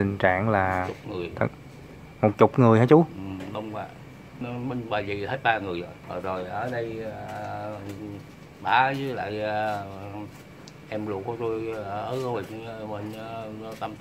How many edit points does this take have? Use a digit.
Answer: 2